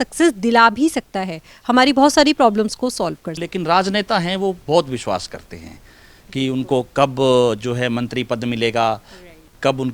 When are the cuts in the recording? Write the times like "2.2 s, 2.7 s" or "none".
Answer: 3.4 s